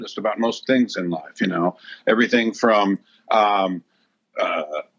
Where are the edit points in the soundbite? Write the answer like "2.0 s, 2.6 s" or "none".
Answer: none

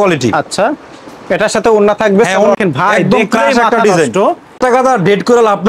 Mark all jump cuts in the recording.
2.6 s, 4.6 s

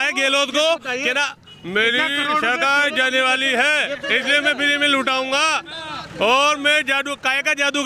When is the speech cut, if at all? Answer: none

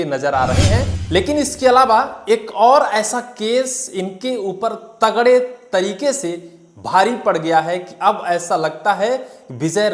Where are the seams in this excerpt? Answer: 1.0 s

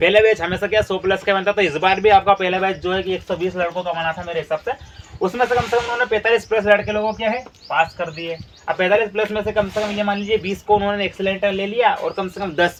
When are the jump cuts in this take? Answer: none

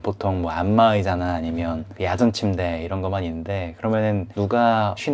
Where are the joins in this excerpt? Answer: none

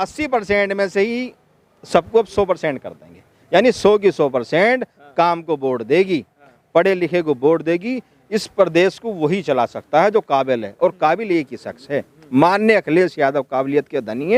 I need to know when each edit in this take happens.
none

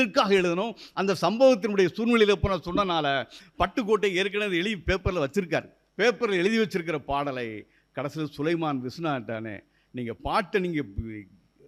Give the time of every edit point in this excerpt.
5.8 s

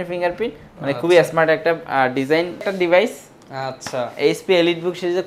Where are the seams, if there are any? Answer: 2.6 s

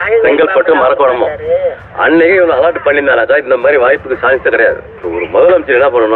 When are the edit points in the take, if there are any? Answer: 4.9 s

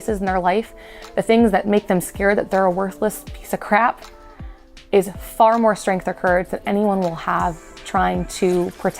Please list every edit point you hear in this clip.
7.8 s

